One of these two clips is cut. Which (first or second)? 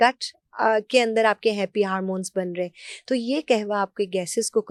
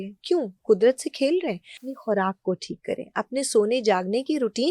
second